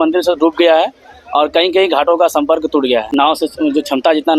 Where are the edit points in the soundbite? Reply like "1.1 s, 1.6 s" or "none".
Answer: 3.2 s